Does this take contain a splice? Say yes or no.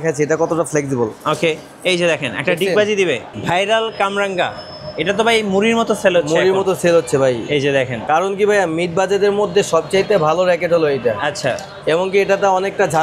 yes